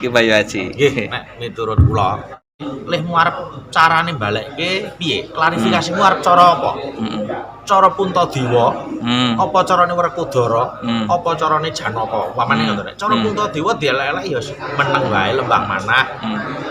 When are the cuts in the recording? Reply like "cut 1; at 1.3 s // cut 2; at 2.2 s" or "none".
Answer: cut 1; at 2.5 s